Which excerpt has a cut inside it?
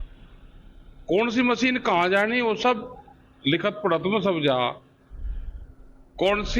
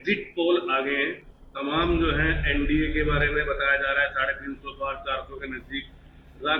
first; 1 cut; at 4.5 s

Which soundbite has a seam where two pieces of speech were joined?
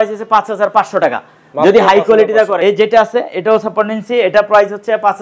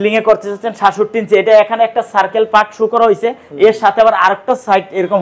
first; 1 cut; at 2.5 s

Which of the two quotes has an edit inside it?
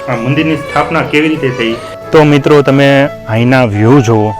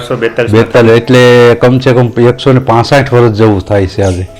first; 1 cut; at 1.9 s

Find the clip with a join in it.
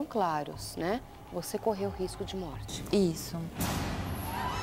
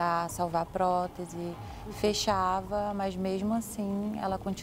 first; 1 cut; at 3.5 s

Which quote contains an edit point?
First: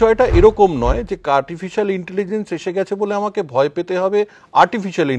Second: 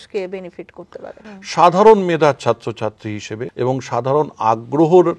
second; 2 cuts; at 1.2 s, 3.4 s

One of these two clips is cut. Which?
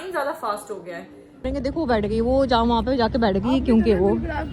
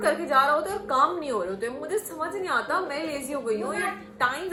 first; 1 cut; at 1.5 s

